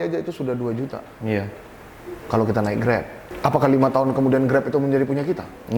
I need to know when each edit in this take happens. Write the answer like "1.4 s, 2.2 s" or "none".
3.2 s